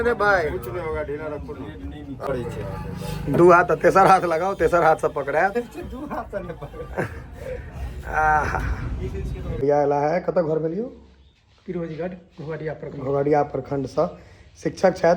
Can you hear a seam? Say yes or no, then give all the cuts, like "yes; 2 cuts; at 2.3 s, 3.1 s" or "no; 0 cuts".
yes; 2 cuts; at 2.1 s, 9.5 s